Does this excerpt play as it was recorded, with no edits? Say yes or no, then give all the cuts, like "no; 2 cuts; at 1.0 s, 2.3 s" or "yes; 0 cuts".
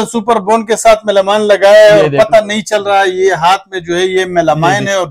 yes; 0 cuts